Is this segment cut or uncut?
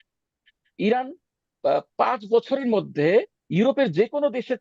uncut